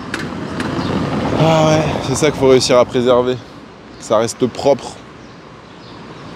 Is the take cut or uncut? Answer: uncut